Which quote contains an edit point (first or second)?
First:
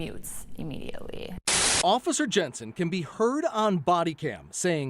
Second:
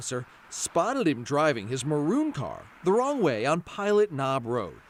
first